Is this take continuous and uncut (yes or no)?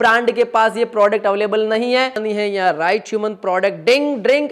no